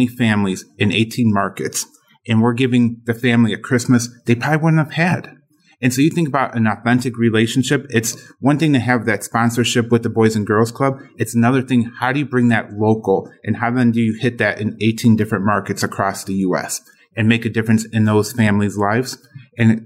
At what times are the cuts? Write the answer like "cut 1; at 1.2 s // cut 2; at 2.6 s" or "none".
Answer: none